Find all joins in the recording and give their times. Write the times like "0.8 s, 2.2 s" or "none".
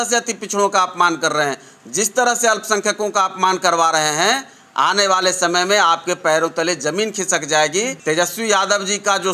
8.0 s